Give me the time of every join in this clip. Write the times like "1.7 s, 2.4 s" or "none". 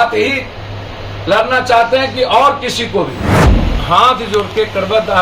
3.4 s